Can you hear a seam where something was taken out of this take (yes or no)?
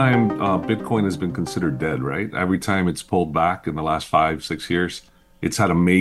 no